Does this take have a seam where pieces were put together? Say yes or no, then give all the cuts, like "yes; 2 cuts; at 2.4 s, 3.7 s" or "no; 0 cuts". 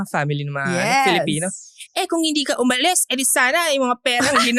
no; 0 cuts